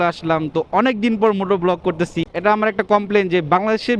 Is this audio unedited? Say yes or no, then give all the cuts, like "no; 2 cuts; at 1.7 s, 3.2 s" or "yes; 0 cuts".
no; 1 cut; at 2.2 s